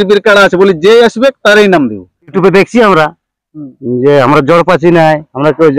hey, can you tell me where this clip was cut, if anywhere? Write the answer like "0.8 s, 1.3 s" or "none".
2.3 s